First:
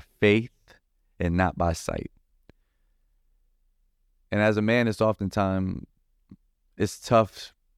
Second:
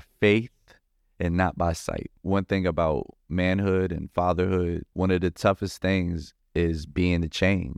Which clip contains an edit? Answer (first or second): second